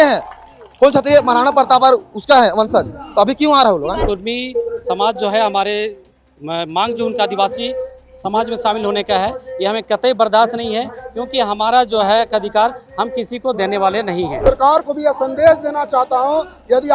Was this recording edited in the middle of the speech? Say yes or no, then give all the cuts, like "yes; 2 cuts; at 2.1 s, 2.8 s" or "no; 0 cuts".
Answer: yes; 2 cuts; at 4.0 s, 14.4 s